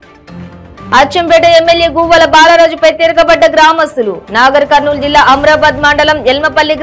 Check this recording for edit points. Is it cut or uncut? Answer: uncut